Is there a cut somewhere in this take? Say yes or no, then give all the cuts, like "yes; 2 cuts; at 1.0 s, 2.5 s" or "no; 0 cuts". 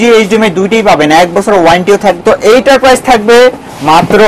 yes; 1 cut; at 2.2 s